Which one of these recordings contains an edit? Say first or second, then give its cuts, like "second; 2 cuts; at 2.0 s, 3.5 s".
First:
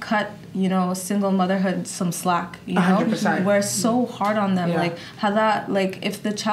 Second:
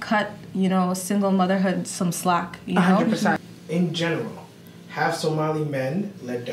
second; 1 cut; at 3.4 s